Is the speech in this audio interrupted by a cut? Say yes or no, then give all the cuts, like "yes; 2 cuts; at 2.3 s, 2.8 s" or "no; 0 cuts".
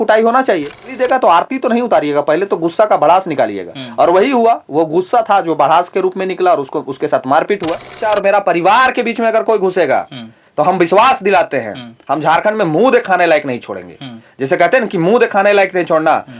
yes; 2 cuts; at 0.9 s, 8.0 s